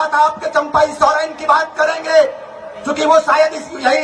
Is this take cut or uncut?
uncut